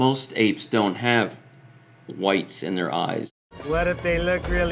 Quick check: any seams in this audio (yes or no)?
no